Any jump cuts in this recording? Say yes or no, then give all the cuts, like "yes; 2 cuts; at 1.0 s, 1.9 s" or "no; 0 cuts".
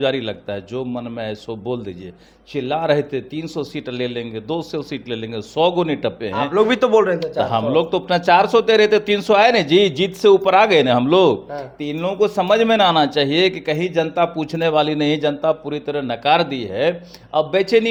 no; 0 cuts